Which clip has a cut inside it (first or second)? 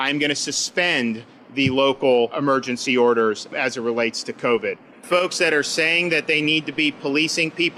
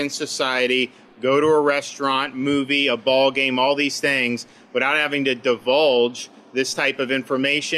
first